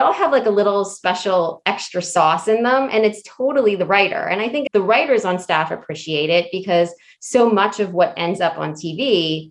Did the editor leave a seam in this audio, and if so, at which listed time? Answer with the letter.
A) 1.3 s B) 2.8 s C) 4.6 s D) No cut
C